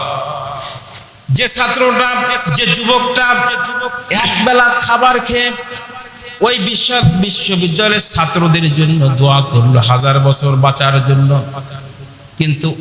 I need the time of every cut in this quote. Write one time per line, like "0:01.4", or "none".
0:04.0